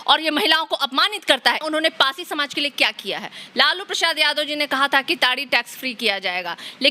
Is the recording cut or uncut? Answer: cut